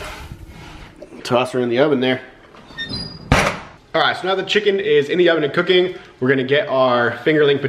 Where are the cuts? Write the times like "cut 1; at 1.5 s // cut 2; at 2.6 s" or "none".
none